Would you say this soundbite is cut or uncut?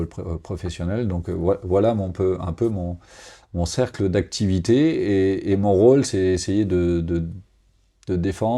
uncut